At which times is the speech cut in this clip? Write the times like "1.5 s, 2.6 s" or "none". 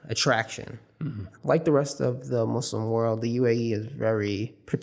1.3 s